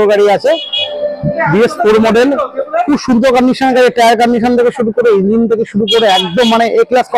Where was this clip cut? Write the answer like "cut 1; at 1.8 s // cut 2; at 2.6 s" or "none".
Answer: none